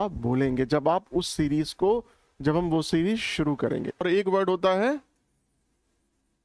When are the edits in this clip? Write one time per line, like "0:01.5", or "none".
0:04.0